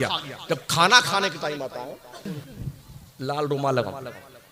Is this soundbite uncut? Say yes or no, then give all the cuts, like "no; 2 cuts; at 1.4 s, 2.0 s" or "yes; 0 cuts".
no; 1 cut; at 2.3 s